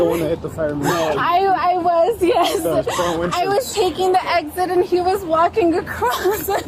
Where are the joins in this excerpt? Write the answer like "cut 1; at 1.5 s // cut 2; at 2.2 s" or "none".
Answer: none